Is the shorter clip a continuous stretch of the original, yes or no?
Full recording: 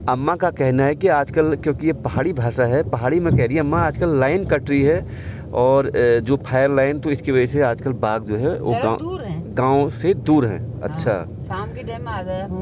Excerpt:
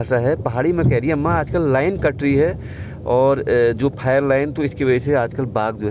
yes